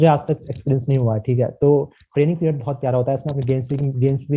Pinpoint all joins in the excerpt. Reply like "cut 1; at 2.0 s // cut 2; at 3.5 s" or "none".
none